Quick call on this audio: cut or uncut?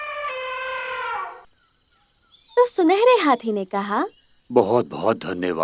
cut